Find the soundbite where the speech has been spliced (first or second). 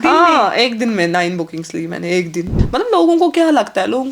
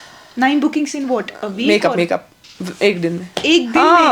first